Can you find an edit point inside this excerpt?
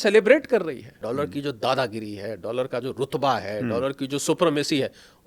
yes; 1 cut; at 0.9 s

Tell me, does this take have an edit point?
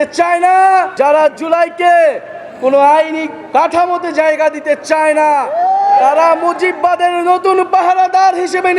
yes; 2 cuts; at 0.9 s, 5.5 s

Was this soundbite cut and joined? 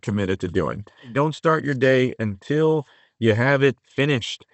yes; 1 cut; at 1.1 s

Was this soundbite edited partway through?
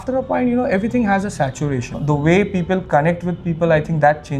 yes; 1 cut; at 1.9 s

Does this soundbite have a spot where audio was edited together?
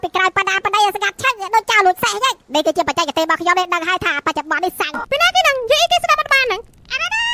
yes; 1 cut; at 4.9 s

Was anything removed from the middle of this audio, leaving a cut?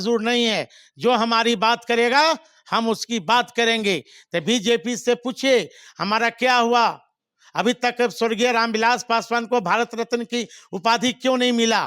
no; 0 cuts

